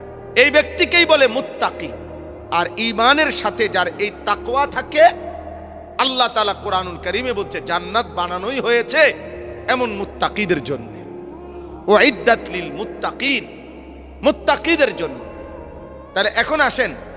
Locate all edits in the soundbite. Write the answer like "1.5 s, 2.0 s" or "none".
none